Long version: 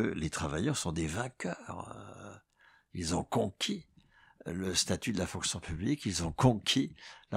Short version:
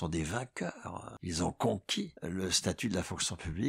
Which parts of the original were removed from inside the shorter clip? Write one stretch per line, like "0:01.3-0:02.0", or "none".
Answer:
0:01.9-0:02.8
0:03.9-0:04.4